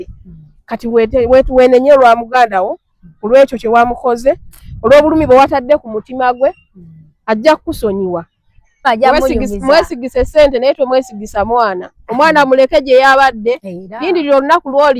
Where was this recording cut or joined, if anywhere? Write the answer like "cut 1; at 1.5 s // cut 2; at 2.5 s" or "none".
cut 1; at 8.9 s

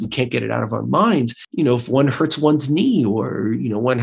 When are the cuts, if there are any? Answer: cut 1; at 1.4 s

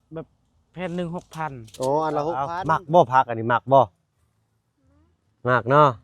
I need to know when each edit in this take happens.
cut 1; at 2.5 s

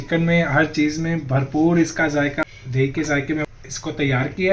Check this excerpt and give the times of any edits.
cut 1; at 2.4 s // cut 2; at 3.5 s

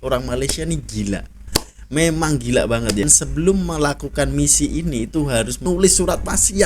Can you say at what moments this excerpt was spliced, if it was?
cut 1; at 3.0 s // cut 2; at 5.6 s

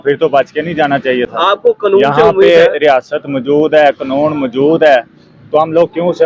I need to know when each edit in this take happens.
none

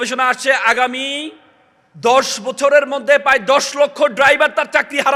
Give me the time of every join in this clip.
none

